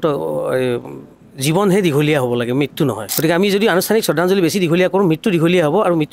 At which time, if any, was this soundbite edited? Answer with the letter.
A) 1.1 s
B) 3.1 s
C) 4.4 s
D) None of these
B